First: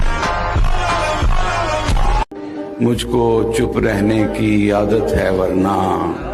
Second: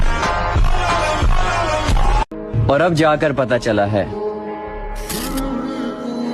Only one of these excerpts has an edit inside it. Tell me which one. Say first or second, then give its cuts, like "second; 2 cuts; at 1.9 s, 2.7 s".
first; 1 cut; at 2.3 s